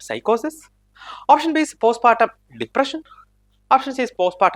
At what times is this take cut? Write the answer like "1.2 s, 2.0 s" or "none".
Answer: none